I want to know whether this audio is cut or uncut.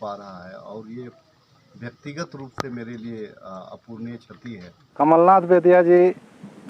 cut